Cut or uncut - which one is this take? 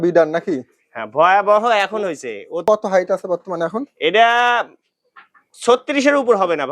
cut